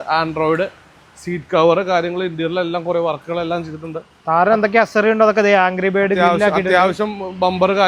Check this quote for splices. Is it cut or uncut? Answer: uncut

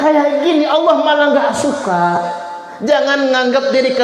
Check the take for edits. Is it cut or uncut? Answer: uncut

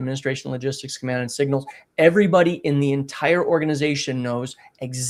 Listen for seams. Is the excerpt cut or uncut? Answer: uncut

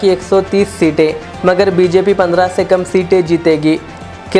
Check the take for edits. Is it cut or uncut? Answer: uncut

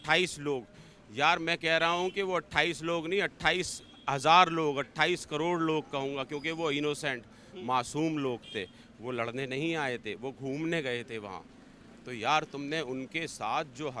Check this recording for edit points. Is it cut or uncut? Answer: uncut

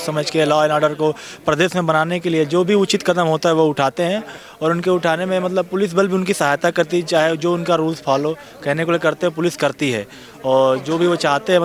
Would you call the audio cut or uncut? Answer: uncut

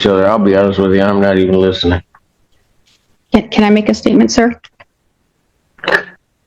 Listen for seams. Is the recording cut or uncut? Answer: uncut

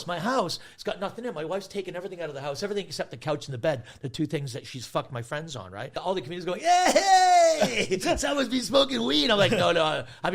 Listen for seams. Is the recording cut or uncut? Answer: cut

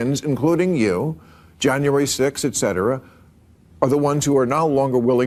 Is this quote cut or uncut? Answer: uncut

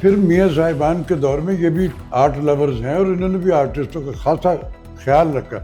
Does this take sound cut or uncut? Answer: cut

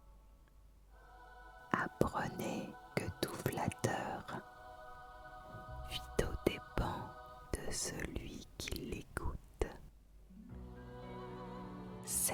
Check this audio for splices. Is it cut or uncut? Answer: uncut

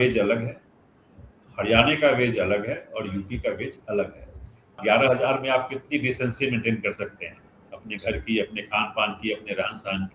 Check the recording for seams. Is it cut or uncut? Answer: cut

